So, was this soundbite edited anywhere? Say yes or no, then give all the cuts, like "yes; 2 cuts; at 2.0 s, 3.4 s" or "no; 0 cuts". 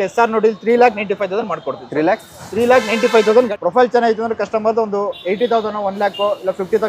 yes; 1 cut; at 3.5 s